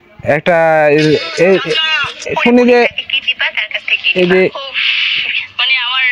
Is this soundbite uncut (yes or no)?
yes